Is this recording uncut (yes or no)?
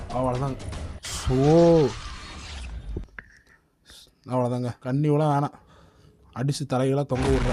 no